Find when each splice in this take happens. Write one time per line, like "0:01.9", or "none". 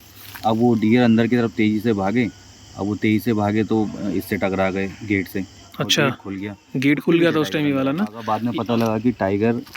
0:08.2